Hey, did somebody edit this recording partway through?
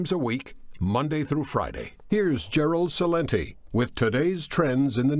yes; 1 cut; at 1.3 s

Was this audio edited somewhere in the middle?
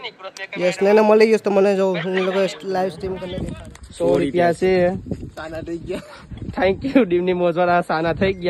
yes; 1 cut; at 3.2 s

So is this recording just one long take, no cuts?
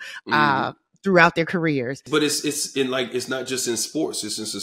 no; 1 cut; at 2.0 s

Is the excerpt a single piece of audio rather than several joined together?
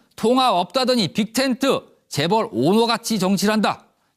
yes; 0 cuts

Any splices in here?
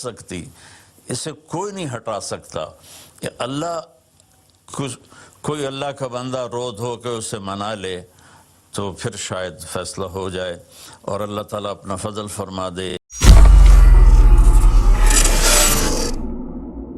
yes; 1 cut; at 12.9 s

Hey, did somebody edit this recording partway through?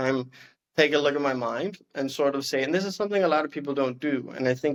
no; 0 cuts

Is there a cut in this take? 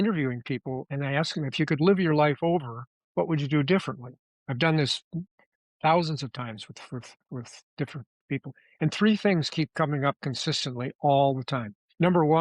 yes; 1 cut; at 0.9 s

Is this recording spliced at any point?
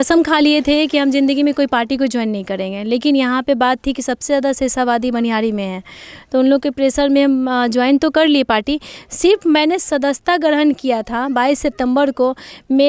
no; 0 cuts

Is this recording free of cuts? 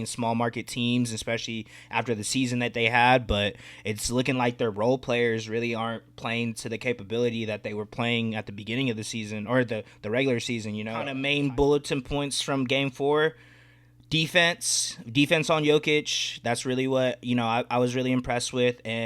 no; 1 cut; at 11.2 s

